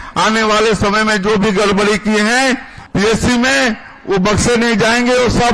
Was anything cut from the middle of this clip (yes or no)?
yes